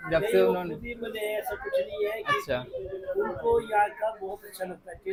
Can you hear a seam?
no; 0 cuts

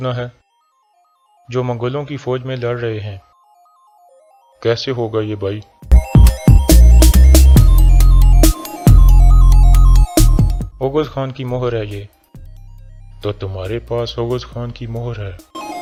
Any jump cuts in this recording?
no; 0 cuts

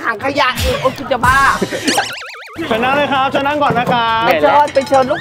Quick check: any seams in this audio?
no; 0 cuts

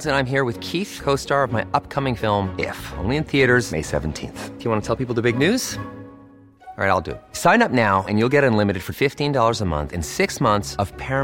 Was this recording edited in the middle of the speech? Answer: no; 0 cuts

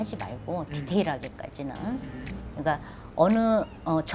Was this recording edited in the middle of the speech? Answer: no; 0 cuts

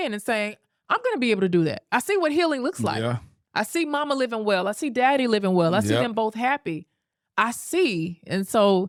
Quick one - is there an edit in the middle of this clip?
no; 0 cuts

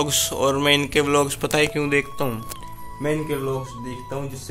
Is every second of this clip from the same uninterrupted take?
yes; 0 cuts

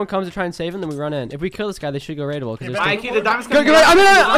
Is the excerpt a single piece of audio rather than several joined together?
yes; 0 cuts

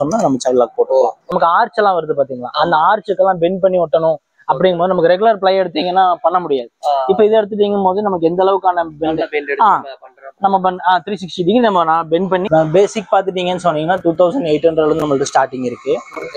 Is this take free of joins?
no; 2 cuts; at 1.4 s, 12.4 s

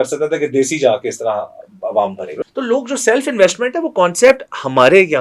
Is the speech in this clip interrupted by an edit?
yes; 1 cut; at 2.3 s

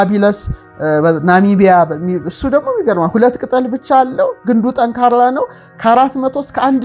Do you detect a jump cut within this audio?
no; 0 cuts

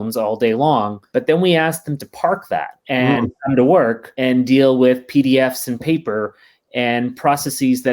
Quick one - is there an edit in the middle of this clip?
yes; 3 cuts; at 1.0 s, 2.8 s, 4.1 s

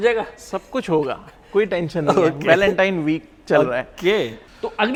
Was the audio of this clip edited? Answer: no; 0 cuts

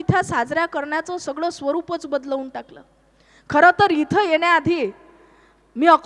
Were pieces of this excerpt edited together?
no; 0 cuts

